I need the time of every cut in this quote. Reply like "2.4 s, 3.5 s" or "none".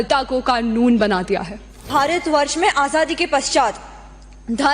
1.9 s